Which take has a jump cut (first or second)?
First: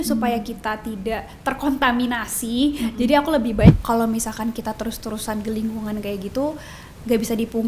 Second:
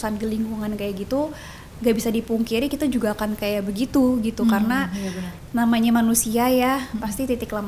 first